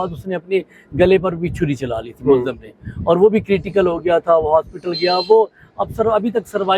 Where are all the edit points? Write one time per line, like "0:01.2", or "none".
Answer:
none